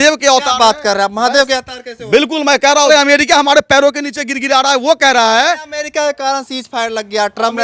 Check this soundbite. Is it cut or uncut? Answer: cut